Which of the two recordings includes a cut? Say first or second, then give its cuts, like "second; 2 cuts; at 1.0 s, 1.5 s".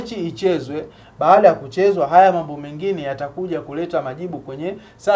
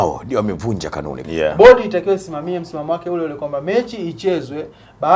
second; 1 cut; at 1.2 s